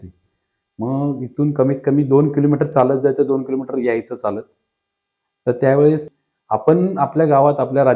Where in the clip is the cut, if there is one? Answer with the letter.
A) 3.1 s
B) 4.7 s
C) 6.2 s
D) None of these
C